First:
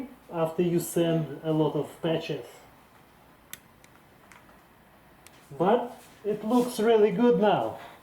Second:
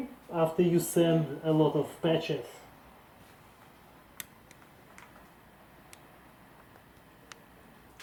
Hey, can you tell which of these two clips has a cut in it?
first; 3 cuts; at 2.8 s, 5.4 s, 6.0 s

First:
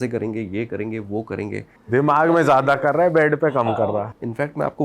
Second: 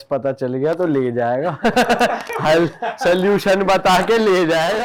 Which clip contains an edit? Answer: first; 2 cuts; at 1.8 s, 3.6 s

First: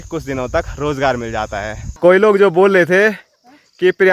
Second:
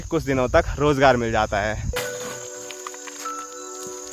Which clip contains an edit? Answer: first; 1 cut; at 2.0 s

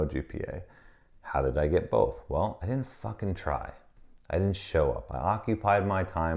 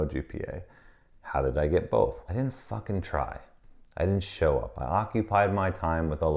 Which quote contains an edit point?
second; 1 cut; at 2.2 s

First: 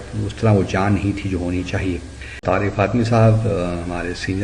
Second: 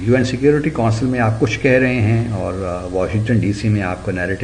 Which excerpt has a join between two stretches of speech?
first; 1 cut; at 2.4 s

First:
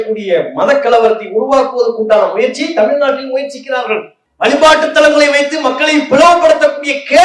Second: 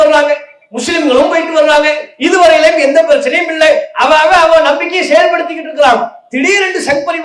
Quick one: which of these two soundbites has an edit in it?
first; 1 cut; at 4.2 s

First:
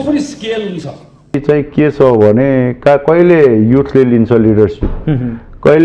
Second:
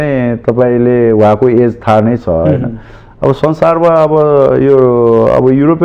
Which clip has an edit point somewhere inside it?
first; 1 cut; at 1.4 s

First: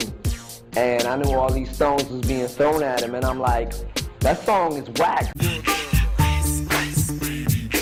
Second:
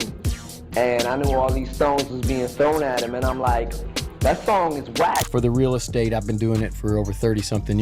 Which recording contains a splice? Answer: second; 1 cut; at 5.5 s

